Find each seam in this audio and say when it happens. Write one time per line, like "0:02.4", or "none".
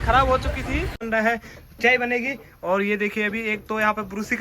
0:01.0